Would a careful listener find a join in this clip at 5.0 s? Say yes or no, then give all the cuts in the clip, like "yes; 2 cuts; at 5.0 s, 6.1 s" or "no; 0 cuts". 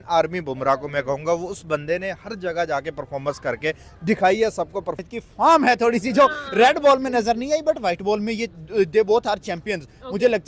yes; 1 cut; at 5.0 s